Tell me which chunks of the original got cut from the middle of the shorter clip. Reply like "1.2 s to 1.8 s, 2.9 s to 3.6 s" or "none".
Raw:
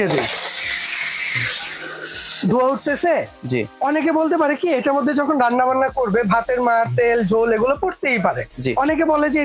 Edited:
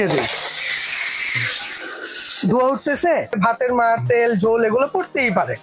3.4 s to 6.2 s